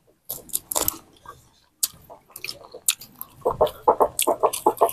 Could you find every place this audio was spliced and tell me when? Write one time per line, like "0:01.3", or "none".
0:03.4